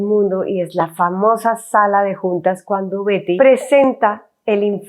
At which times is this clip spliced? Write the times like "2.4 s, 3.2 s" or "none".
3.4 s